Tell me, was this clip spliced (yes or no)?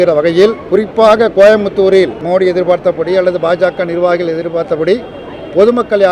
no